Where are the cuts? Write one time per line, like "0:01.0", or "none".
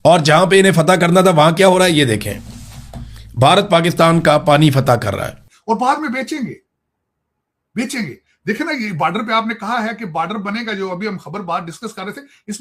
0:05.5